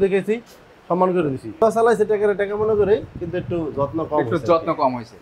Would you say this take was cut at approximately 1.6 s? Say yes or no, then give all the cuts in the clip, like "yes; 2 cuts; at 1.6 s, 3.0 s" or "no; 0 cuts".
yes; 1 cut; at 1.6 s